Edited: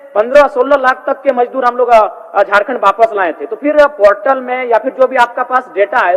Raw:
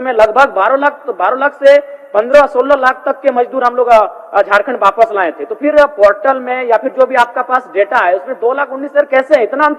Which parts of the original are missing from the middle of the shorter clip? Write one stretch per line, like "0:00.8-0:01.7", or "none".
none